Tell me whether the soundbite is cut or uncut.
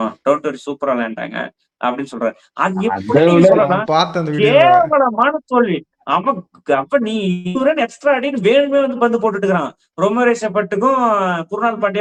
uncut